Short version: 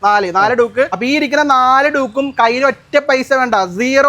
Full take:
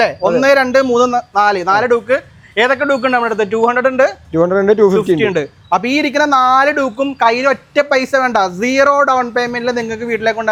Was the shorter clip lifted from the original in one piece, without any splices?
no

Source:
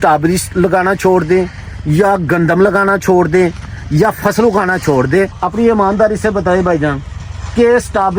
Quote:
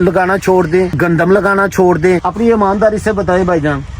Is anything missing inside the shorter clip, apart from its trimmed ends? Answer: yes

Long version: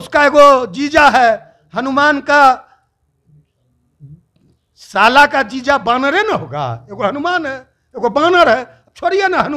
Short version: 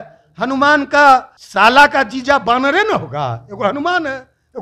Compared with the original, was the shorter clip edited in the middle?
yes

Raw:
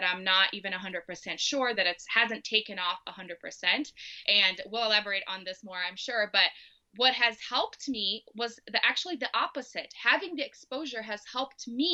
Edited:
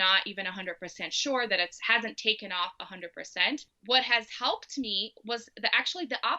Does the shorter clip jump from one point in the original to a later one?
yes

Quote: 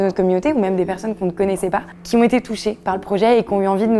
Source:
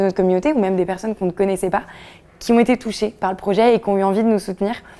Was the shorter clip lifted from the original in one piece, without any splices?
no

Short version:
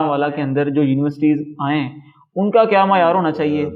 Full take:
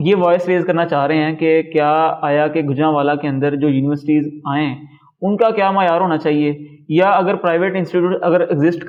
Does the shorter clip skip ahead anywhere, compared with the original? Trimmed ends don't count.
no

